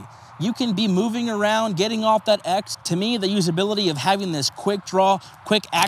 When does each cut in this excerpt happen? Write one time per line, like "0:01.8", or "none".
0:02.7